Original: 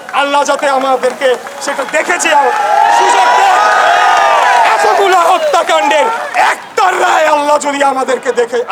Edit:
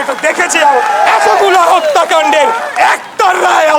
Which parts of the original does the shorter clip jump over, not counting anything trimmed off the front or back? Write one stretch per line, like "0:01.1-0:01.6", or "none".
0:02.8-0:04.6